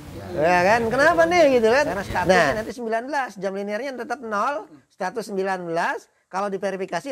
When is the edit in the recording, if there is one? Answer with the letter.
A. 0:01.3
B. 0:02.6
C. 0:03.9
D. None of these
B